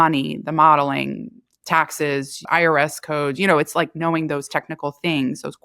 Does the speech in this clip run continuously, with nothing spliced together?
no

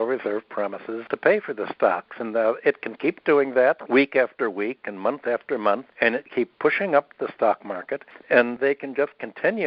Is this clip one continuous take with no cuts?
no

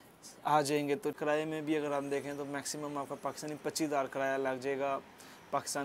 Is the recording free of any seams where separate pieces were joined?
no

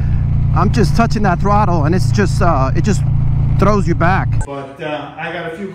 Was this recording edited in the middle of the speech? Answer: yes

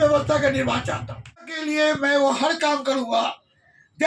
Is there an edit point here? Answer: yes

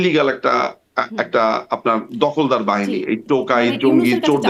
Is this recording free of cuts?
yes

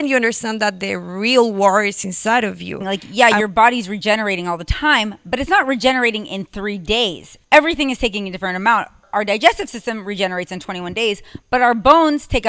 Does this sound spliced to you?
yes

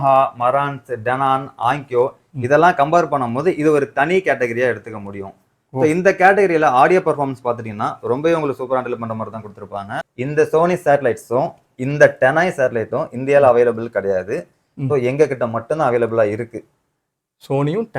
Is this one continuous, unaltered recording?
no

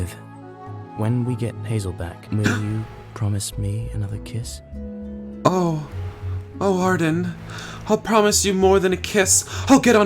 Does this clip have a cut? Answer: yes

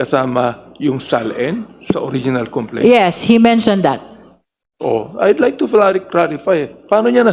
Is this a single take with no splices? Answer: yes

